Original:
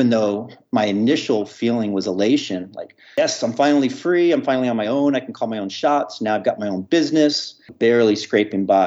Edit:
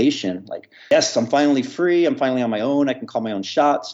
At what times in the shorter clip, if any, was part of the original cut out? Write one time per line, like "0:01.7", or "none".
none